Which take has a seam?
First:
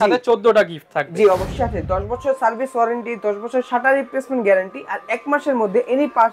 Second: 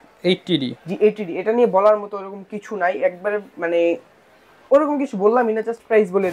first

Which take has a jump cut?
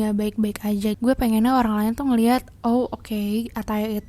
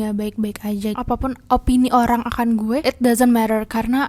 second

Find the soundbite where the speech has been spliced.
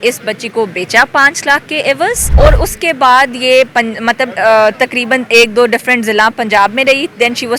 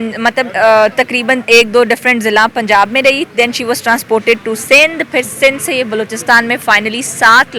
first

